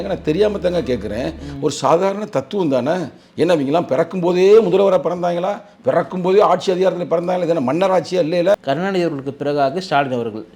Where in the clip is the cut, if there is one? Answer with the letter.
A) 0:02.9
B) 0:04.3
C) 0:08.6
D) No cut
C